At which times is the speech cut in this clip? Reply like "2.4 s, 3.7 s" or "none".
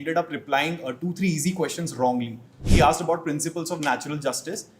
2.6 s